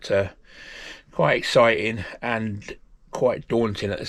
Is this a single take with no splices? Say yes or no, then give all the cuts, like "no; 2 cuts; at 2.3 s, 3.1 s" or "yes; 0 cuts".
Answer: yes; 0 cuts